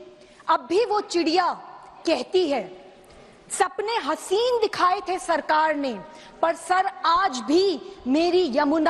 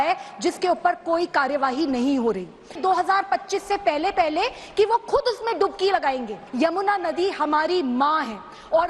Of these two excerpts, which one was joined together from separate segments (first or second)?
second